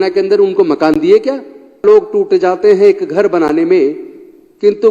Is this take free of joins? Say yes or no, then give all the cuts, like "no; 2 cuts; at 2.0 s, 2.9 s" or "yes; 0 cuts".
no; 1 cut; at 1.8 s